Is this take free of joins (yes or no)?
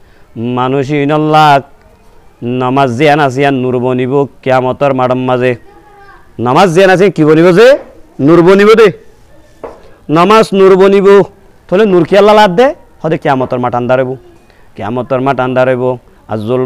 yes